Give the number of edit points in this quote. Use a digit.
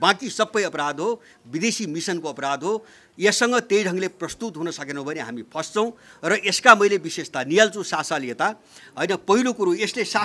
0